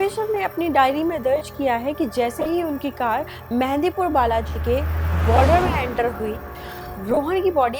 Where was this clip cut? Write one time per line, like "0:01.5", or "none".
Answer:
none